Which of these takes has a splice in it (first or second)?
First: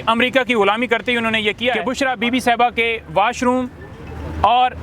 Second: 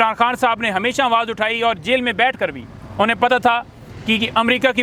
first